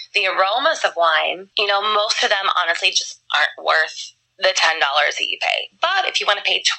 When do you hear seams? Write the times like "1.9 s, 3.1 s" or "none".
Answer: 1.5 s